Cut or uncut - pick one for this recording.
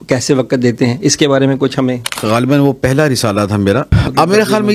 cut